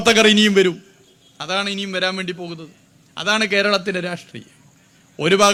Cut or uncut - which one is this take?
uncut